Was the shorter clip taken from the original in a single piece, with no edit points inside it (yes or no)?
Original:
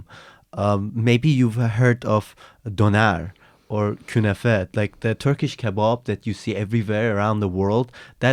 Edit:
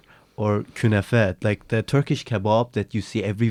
yes